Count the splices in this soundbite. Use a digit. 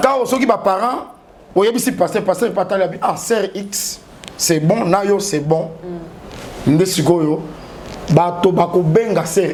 0